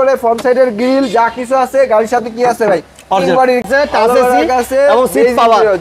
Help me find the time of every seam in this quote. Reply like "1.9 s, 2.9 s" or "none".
3.6 s